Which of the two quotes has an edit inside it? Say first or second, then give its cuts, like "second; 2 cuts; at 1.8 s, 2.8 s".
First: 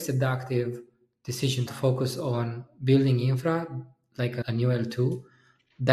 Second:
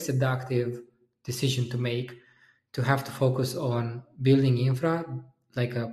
first; 2 cuts; at 1.7 s, 4.4 s